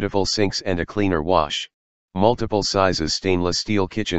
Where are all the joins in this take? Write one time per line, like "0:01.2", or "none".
0:01.5